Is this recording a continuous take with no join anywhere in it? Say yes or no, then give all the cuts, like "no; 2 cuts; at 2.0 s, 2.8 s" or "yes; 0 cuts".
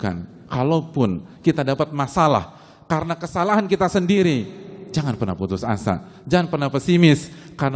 yes; 0 cuts